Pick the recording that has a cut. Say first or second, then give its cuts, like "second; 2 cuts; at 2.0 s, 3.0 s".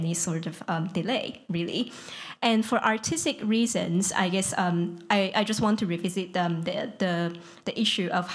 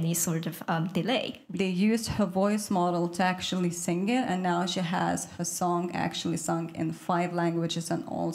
second; 1 cut; at 1.4 s